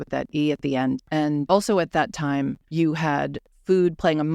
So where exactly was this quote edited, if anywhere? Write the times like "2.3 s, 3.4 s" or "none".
1.3 s, 2.6 s, 3.5 s